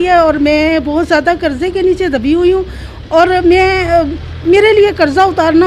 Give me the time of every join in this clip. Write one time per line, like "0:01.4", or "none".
none